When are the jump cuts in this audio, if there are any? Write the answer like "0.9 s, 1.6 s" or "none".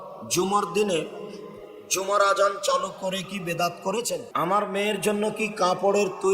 4.3 s